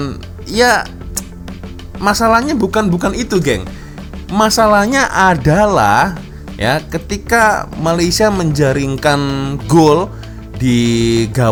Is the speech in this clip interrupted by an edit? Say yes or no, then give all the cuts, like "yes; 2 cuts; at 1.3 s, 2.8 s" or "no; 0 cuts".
no; 0 cuts